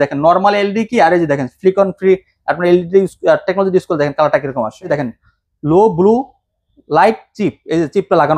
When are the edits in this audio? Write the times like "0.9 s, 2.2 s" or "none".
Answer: 4.9 s